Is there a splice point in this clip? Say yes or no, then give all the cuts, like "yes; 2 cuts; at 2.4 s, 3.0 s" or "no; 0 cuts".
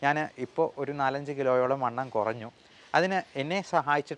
no; 0 cuts